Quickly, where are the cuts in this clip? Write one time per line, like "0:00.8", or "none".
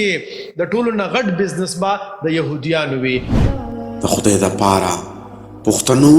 0:03.4